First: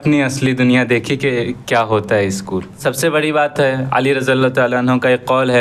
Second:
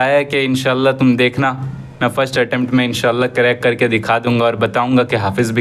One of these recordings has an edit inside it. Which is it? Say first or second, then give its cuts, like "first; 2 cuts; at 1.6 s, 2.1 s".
first; 1 cut; at 2.8 s